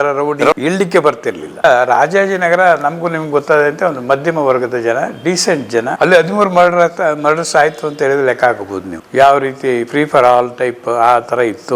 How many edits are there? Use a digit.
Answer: 2